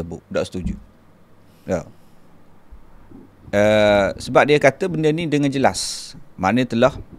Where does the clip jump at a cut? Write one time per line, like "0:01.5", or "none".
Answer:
none